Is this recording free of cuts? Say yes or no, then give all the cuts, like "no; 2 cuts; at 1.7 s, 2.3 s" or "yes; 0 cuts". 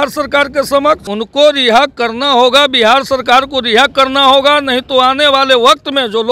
no; 1 cut; at 1.2 s